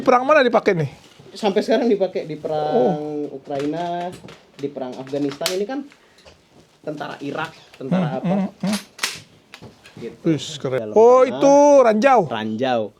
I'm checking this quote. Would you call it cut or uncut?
cut